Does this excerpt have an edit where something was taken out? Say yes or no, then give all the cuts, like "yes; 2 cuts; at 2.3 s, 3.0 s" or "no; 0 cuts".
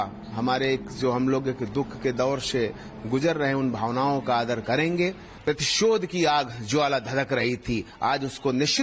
yes; 1 cut; at 5.3 s